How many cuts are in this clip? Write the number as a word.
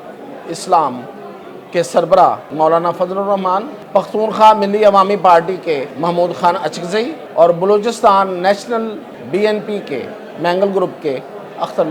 five